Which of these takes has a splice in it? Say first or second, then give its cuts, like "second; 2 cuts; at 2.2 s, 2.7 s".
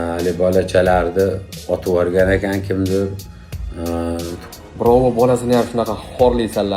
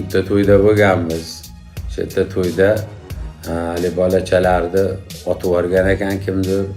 first; 1 cut; at 4.4 s